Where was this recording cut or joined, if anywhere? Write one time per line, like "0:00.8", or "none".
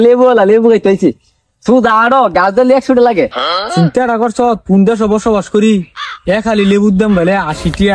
0:03.7

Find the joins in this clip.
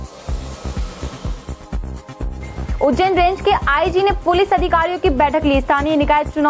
0:01.3

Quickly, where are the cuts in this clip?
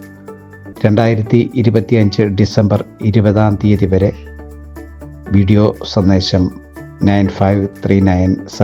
none

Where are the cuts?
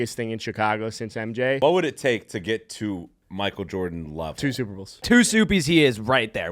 0:01.6
0:05.1

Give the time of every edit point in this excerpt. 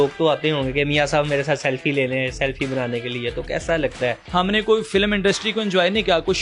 0:04.2

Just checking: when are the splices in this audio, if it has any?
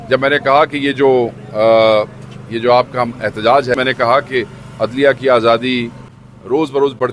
0:03.8
0:05.9

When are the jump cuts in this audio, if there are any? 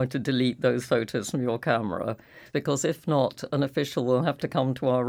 0:02.4

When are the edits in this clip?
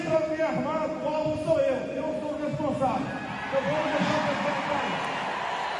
none

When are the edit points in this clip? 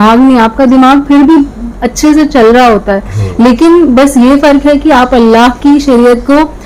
none

